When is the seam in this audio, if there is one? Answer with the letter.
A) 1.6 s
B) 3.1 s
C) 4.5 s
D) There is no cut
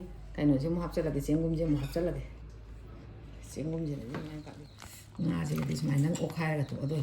C